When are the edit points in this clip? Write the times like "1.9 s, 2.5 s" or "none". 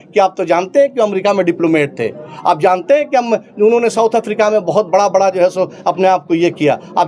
none